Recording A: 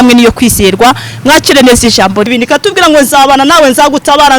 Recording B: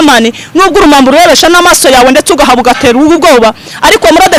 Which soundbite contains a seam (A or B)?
A